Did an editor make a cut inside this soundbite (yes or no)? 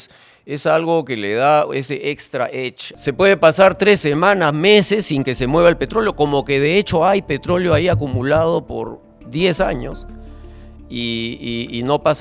yes